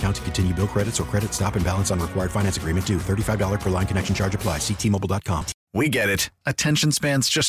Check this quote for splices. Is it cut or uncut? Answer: cut